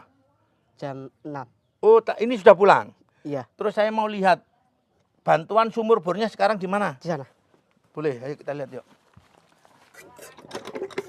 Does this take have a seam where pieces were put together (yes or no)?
yes